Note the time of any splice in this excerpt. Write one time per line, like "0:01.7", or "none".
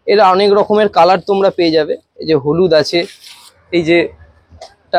none